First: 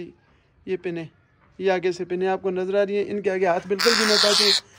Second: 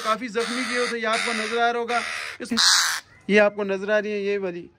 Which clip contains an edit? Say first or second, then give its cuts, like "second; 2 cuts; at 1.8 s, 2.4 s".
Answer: second; 1 cut; at 2.5 s